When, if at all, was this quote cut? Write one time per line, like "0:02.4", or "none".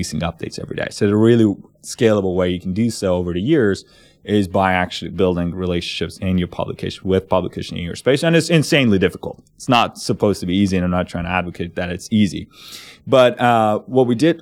none

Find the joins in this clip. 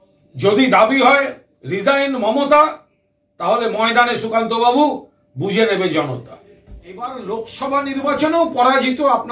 0:07.0

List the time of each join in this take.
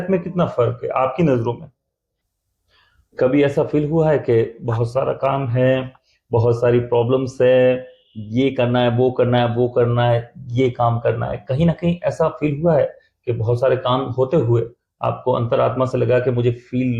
0:02.3

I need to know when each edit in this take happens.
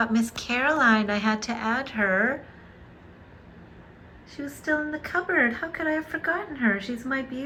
none

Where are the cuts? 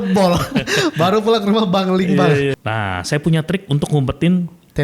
0:02.6

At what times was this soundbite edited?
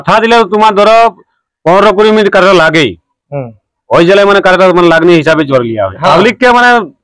0:05.9

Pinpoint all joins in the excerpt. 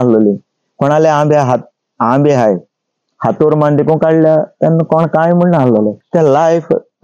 0:06.0

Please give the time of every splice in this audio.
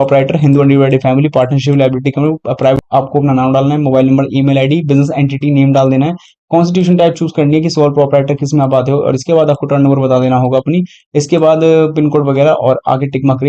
0:02.8

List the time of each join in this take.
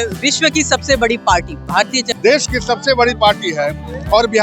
0:02.0

